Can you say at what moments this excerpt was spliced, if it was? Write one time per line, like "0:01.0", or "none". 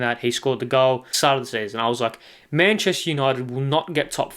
0:01.1